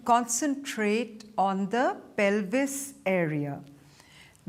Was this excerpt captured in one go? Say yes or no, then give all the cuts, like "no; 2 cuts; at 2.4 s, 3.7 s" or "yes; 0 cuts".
yes; 0 cuts